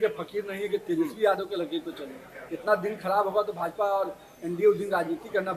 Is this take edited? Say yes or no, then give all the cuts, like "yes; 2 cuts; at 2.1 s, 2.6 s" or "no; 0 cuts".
no; 0 cuts